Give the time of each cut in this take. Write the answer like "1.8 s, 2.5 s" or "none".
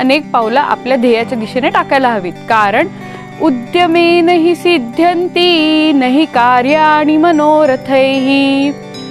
3.1 s